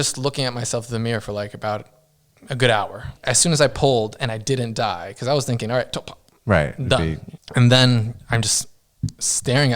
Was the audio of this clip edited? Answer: yes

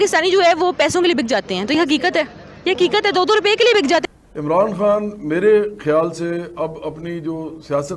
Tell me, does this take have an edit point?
yes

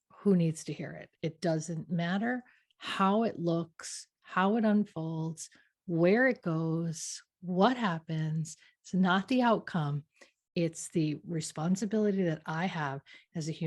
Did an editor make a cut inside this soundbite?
no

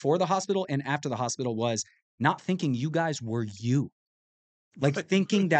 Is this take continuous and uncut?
yes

